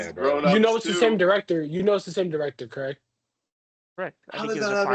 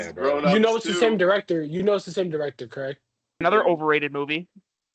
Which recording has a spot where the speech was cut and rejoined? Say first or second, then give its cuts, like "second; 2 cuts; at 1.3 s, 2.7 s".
second; 1 cut; at 3.4 s